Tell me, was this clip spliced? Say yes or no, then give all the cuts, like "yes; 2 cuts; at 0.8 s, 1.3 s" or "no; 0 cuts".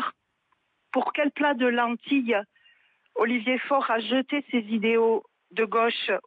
no; 0 cuts